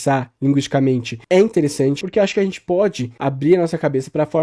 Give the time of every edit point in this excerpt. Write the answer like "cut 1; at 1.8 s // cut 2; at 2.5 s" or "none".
cut 1; at 1.1 s // cut 2; at 2.0 s // cut 3; at 3.1 s